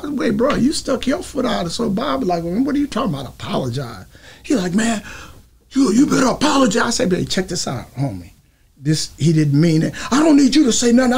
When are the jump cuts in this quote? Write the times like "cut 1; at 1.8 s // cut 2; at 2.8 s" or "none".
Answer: none

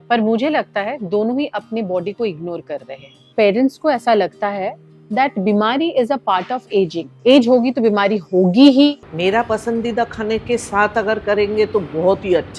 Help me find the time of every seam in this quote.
cut 1; at 3.3 s // cut 2; at 9.0 s

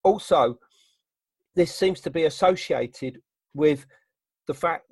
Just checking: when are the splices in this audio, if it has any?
cut 1; at 1.2 s

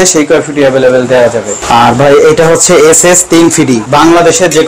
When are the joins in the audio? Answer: cut 1; at 1.6 s // cut 2; at 3.8 s

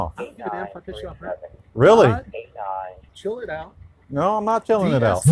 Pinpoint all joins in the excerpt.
cut 1; at 3.0 s

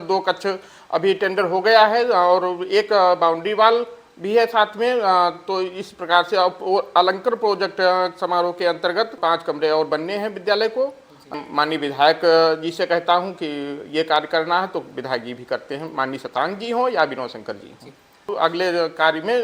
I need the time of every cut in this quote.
cut 1; at 9.2 s // cut 2; at 11.3 s // cut 3; at 18.3 s

